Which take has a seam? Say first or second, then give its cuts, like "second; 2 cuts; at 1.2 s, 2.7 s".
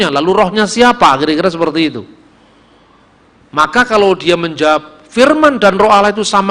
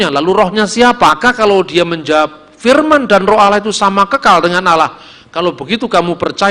second; 1 cut; at 1.1 s